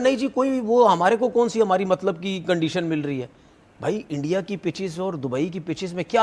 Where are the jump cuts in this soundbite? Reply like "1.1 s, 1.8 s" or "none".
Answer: none